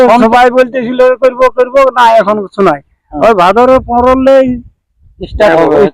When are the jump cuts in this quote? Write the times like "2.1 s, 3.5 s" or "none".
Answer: none